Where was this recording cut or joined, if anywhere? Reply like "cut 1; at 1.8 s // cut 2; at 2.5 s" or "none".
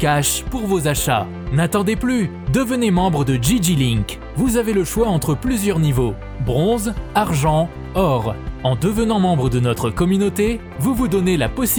none